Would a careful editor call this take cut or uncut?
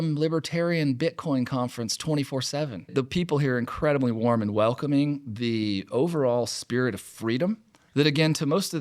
cut